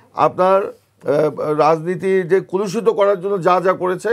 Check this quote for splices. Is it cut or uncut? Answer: uncut